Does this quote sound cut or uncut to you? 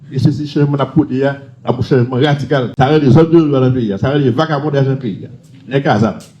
cut